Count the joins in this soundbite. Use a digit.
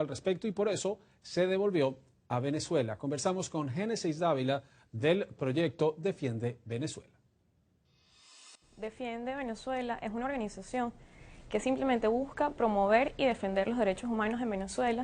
1